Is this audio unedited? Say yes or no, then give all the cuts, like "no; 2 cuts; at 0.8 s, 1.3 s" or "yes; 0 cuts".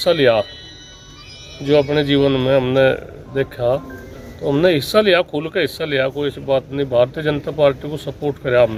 yes; 0 cuts